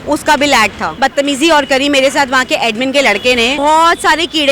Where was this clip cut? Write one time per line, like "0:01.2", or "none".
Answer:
0:00.9
0:03.6